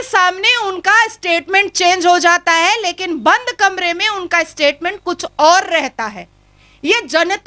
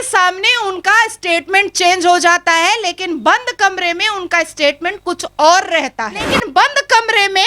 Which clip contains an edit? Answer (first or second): second